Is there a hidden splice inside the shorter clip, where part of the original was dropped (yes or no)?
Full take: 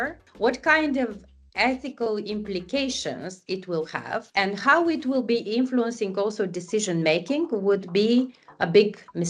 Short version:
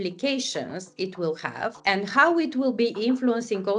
no